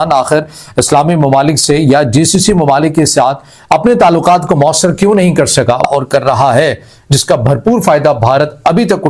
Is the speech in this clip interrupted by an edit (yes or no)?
yes